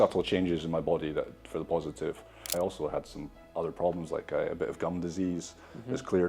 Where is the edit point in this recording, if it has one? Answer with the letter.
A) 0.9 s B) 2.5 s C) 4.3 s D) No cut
B